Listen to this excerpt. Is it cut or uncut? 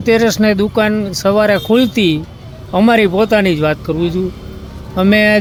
uncut